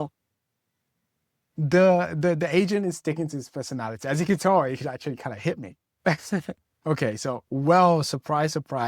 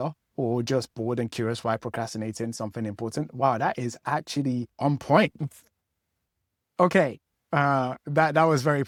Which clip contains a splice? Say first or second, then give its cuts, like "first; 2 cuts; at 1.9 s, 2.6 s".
first; 1 cut; at 6.6 s